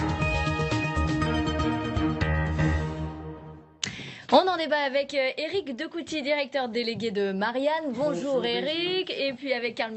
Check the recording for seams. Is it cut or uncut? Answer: cut